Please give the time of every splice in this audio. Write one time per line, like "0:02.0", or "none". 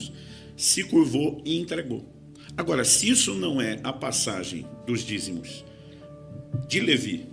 0:03.8